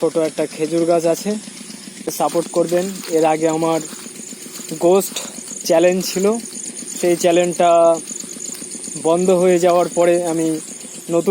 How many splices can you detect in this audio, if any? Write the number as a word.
one